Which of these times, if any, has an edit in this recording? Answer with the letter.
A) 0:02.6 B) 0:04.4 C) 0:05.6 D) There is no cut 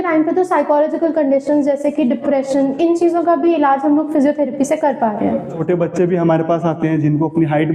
C